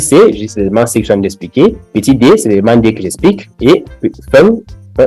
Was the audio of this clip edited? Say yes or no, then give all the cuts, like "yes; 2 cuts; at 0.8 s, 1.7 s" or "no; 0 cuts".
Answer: yes; 2 cuts; at 1.8 s, 3.5 s